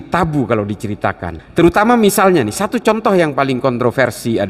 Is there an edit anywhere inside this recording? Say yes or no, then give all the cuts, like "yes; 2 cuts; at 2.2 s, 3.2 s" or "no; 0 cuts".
yes; 1 cut; at 1.3 s